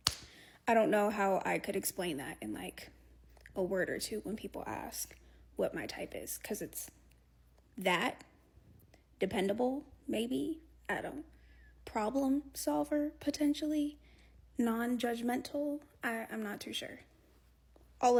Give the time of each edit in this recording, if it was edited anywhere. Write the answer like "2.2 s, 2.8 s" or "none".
none